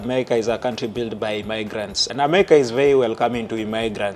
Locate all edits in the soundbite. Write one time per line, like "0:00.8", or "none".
0:02.1